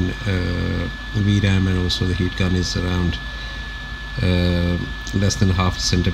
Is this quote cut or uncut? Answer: uncut